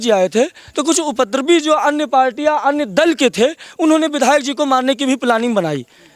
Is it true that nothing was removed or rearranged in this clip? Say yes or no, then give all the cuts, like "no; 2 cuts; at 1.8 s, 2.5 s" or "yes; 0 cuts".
yes; 0 cuts